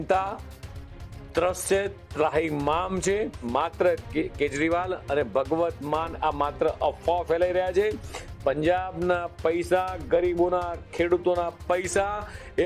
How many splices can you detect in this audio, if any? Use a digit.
1